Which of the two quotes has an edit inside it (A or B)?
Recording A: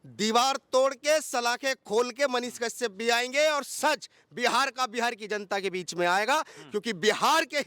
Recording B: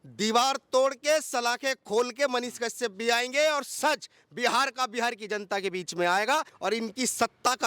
B